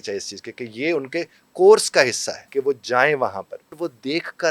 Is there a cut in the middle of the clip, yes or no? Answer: yes